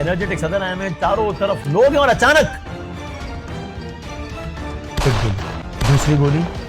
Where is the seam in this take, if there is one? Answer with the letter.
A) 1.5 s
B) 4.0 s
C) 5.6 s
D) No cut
C